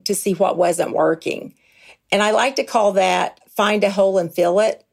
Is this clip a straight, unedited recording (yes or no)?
yes